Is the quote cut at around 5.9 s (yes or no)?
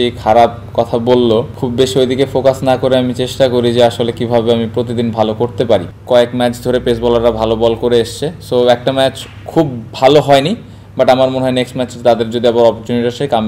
yes